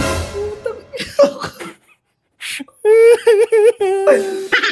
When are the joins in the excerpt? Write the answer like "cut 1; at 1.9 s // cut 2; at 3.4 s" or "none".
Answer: none